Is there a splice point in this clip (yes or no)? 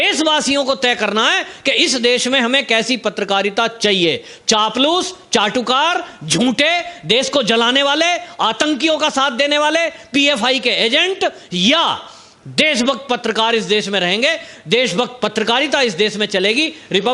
no